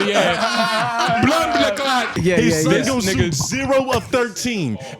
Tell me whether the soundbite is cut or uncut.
cut